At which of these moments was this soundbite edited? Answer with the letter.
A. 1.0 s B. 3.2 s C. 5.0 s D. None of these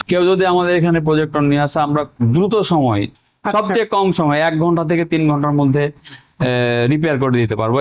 B